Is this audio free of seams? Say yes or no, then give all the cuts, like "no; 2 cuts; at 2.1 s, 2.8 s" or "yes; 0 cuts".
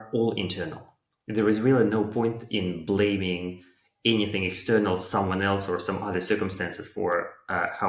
yes; 0 cuts